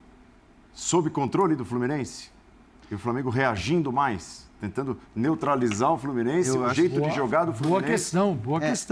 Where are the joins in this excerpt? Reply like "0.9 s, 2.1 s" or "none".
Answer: none

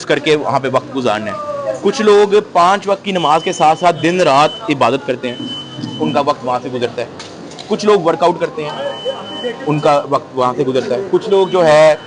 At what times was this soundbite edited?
none

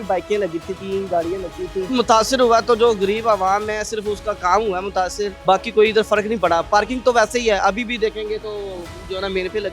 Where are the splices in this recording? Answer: 1.9 s, 5.4 s

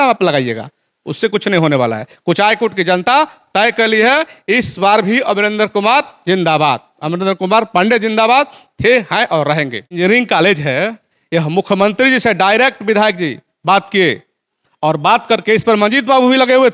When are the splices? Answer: 9.9 s

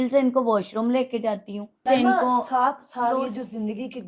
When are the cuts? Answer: 1.8 s

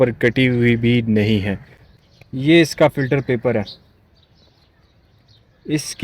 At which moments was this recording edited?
1.9 s

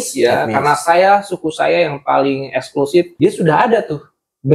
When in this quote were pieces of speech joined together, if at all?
3.1 s

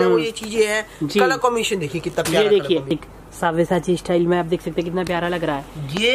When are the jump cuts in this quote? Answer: 2.9 s

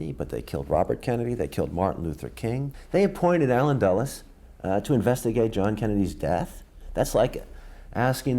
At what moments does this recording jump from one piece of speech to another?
2.7 s

